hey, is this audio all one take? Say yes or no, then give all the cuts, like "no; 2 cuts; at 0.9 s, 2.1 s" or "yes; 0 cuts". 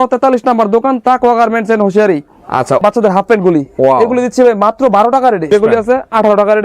no; 2 cuts; at 2.8 s, 5.5 s